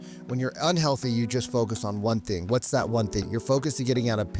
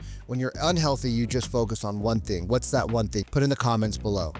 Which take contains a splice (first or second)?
first